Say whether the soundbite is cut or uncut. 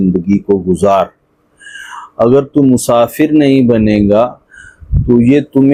uncut